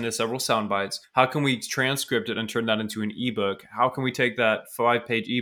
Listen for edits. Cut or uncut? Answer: cut